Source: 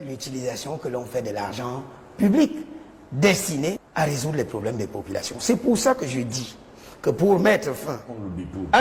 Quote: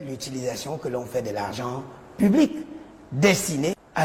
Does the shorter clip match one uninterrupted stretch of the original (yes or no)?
yes